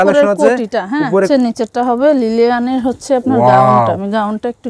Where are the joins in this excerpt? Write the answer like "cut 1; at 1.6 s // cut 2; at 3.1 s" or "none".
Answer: cut 1; at 1.3 s